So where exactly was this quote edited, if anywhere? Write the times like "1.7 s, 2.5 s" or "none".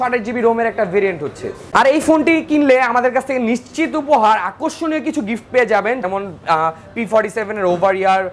1.6 s, 6.0 s